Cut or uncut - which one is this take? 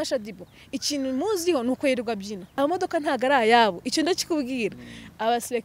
cut